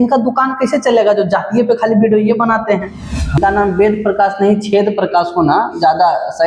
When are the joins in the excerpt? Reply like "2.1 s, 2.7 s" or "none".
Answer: 3.4 s

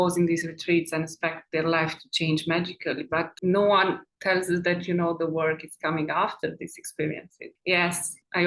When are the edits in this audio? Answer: 3.3 s

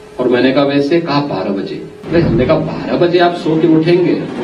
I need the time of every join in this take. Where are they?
1.9 s

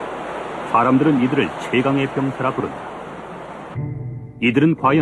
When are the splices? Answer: 1.4 s

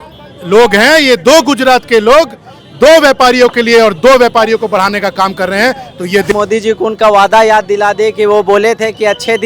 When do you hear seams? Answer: 6.3 s

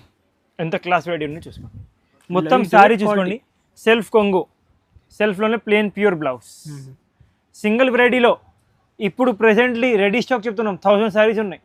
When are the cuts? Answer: none

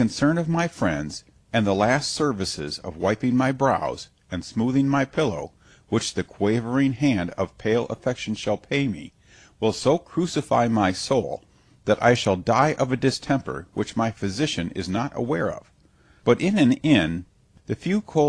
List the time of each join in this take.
none

